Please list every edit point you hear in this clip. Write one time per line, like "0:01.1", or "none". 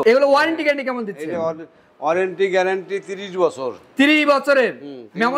none